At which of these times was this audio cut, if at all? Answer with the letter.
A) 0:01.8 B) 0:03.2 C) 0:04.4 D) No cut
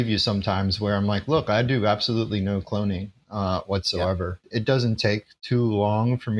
C